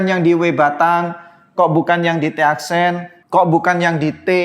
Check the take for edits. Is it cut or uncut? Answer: cut